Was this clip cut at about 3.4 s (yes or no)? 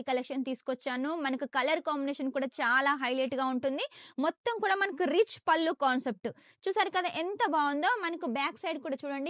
no